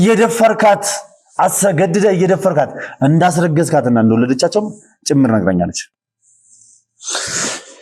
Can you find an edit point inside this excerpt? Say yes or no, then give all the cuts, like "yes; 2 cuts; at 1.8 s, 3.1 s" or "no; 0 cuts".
no; 0 cuts